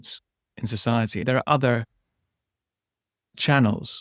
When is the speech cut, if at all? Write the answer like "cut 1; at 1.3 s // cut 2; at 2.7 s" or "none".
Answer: cut 1; at 1.2 s